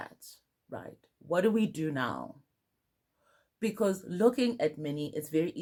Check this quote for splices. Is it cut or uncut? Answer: uncut